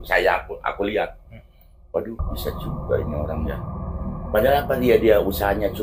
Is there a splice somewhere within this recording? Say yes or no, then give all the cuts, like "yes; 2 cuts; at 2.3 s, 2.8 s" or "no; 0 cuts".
no; 0 cuts